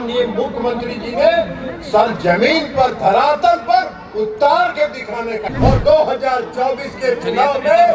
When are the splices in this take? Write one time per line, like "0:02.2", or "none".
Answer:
0:05.5